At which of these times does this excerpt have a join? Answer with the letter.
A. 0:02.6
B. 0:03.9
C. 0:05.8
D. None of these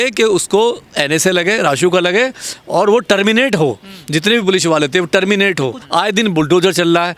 C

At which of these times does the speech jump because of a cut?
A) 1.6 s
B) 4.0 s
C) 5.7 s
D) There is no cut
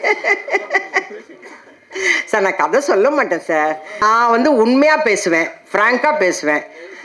B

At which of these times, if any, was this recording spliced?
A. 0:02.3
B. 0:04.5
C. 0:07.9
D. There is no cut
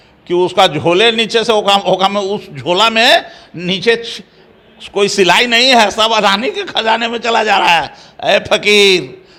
D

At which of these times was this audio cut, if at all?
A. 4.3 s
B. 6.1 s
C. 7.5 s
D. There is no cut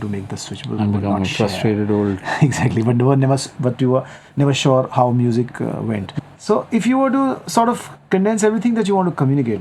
B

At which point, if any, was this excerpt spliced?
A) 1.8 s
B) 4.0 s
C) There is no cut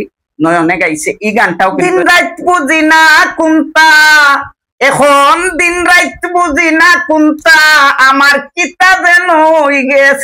A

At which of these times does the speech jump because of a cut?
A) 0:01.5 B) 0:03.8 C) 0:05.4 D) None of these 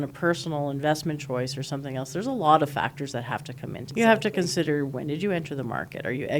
B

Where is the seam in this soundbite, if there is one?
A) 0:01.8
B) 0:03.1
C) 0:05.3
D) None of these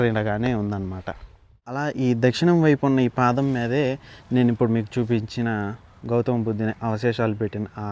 A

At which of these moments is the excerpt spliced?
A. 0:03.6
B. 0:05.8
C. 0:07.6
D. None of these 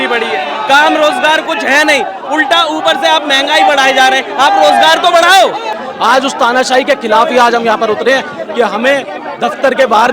B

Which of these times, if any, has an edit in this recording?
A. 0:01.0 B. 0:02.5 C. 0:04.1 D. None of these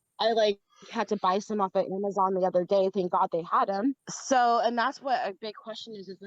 C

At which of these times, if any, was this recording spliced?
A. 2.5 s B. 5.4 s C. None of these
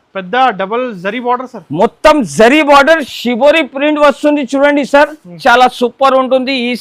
B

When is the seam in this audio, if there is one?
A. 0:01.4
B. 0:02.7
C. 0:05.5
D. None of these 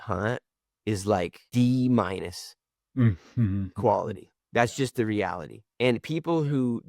A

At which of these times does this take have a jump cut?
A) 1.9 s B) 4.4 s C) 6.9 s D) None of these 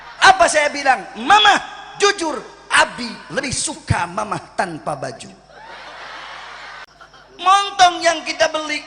C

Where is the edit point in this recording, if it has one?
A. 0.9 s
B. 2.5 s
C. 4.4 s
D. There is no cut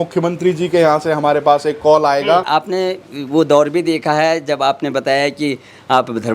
B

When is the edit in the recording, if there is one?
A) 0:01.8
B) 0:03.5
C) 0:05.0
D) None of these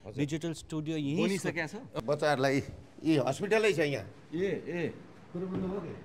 A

